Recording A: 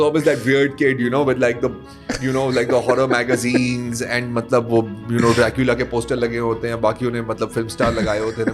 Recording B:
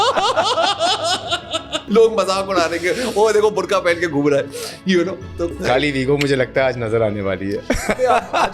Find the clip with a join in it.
B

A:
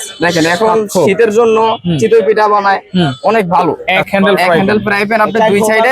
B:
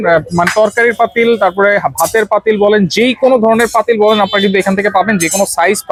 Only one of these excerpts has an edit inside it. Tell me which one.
A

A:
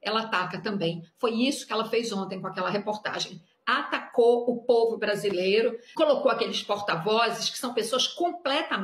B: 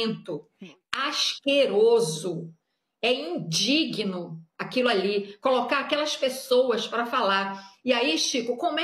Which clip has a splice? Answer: A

